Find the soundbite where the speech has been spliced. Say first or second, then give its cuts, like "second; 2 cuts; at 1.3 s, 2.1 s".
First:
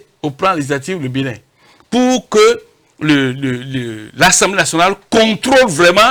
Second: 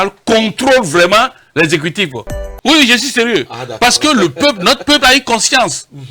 second; 1 cut; at 2.5 s